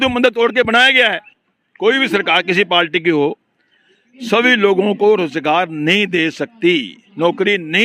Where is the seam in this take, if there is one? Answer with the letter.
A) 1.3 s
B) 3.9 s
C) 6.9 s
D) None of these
A